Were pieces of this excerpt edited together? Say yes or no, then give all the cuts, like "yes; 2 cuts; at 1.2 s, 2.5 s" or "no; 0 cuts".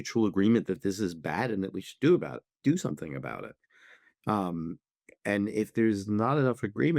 no; 0 cuts